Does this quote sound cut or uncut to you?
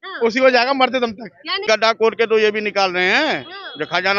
cut